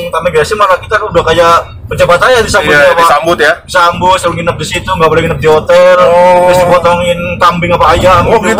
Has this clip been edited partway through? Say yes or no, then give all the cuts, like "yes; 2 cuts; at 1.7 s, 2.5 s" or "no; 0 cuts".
no; 0 cuts